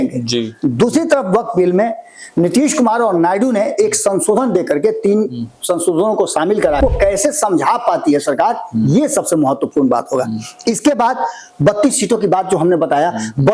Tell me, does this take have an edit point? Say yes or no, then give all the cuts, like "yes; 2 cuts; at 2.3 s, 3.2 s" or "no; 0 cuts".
yes; 1 cut; at 6.8 s